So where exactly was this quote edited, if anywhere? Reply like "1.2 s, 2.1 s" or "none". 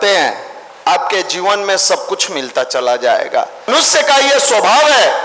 3.7 s